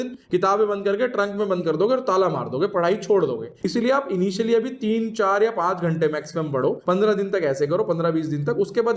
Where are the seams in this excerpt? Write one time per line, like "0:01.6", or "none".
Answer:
none